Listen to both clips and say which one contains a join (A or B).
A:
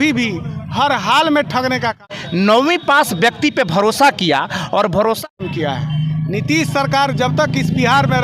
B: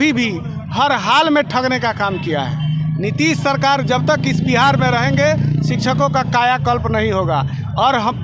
A